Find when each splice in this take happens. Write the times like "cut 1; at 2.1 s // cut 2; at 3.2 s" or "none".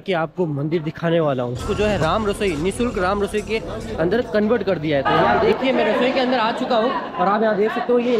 cut 1; at 1.6 s // cut 2; at 5.3 s